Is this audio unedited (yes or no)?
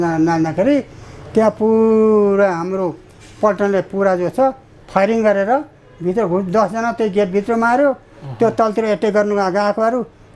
yes